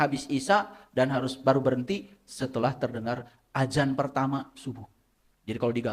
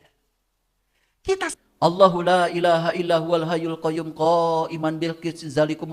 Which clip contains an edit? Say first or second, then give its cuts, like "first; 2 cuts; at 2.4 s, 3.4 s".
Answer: second; 1 cut; at 1.6 s